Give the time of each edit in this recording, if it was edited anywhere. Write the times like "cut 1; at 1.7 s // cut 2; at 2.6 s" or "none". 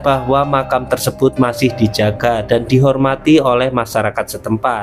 none